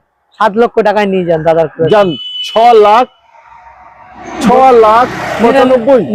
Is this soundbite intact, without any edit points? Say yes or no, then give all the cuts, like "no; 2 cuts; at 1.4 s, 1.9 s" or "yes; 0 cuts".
yes; 0 cuts